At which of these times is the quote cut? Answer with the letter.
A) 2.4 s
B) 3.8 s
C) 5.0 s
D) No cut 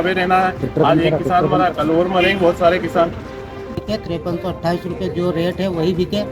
B